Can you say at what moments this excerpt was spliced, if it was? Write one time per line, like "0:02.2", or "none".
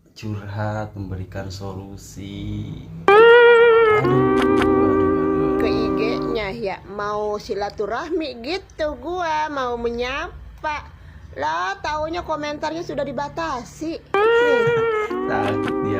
0:03.0
0:06.3

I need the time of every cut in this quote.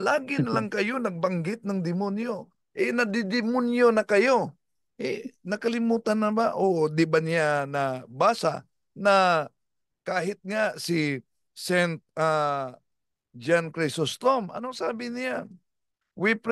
none

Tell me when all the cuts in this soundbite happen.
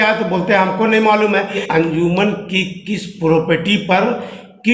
0:01.6

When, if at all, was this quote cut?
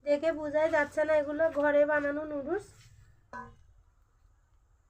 0:03.3

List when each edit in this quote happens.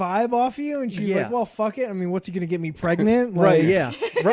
none

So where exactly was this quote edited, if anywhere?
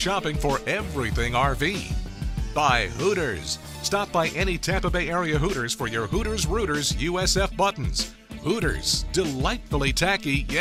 none

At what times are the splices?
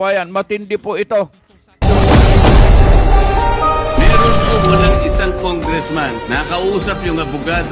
0:01.8

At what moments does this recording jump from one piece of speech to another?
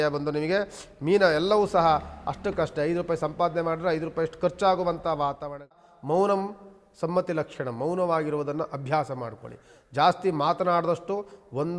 0:05.8

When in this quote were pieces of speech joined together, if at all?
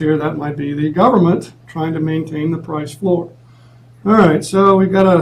none

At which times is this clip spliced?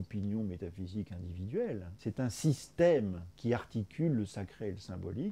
0:01.9
0:03.3

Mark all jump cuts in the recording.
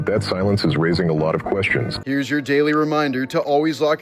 0:01.9

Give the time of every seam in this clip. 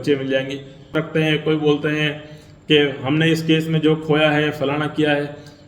0:00.9

